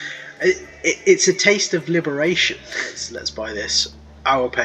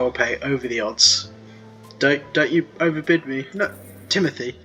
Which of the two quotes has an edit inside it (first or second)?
first